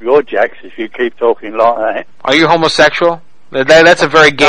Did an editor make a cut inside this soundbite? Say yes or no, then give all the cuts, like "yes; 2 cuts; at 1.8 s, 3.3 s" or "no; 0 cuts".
no; 0 cuts